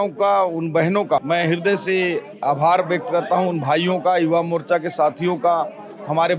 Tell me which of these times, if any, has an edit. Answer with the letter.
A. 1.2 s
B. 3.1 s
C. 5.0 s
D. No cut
A